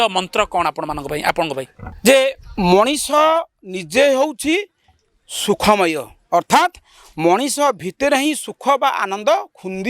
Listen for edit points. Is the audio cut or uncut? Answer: cut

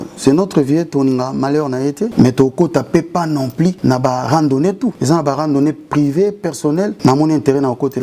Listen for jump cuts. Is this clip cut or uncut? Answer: cut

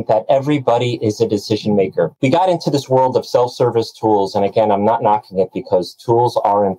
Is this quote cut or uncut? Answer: cut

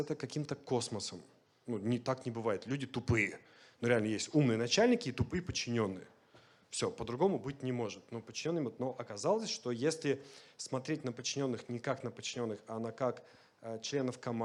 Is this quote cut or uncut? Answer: uncut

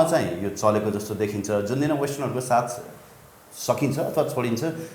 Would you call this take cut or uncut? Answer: uncut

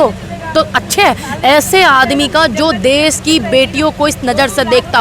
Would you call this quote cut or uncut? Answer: uncut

